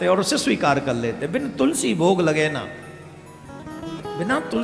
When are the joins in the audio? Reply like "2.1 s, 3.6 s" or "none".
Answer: none